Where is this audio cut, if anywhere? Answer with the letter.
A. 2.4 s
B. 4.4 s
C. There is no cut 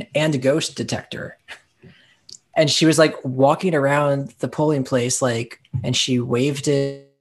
A